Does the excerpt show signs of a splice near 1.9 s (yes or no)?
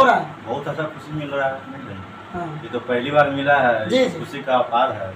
no